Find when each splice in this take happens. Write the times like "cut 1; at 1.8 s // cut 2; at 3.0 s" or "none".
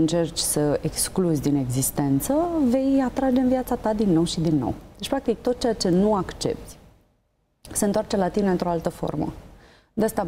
none